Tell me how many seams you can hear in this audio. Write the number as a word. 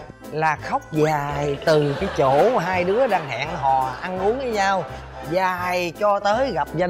zero